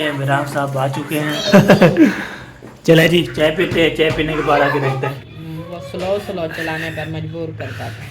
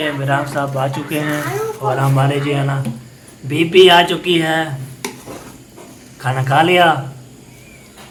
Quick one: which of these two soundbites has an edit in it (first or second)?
first